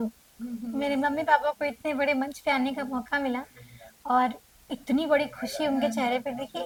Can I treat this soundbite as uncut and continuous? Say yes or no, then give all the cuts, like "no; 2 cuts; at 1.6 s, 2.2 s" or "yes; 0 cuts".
yes; 0 cuts